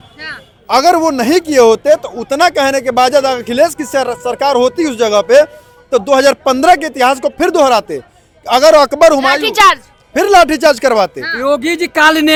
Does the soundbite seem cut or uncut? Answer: uncut